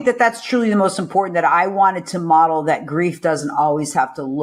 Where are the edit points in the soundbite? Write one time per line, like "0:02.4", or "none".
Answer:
none